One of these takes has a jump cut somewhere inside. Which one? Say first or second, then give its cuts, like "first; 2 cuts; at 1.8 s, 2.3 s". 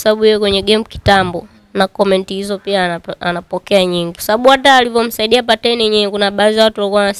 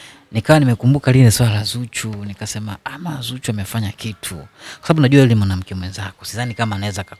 first; 1 cut; at 4.2 s